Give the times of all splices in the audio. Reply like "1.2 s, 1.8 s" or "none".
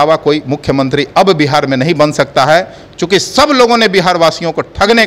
none